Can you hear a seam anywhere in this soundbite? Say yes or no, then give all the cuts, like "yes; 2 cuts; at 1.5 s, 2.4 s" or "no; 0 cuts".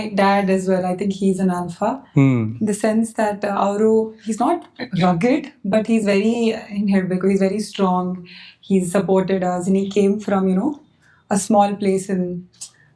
no; 0 cuts